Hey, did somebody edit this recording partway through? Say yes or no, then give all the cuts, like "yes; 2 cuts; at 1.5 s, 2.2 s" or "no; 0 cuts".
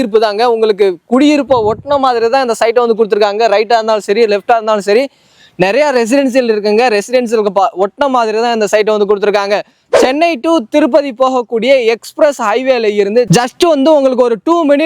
yes; 1 cut; at 9.8 s